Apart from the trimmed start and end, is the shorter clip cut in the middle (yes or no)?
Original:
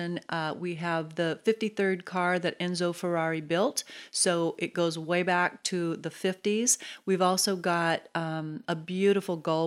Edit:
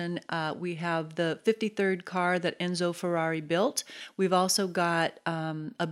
yes